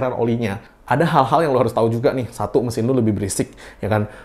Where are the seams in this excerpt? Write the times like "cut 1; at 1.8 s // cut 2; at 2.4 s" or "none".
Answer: none